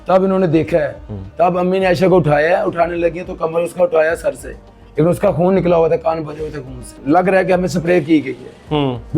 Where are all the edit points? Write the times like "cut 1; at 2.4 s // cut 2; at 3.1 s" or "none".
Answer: cut 1; at 6.9 s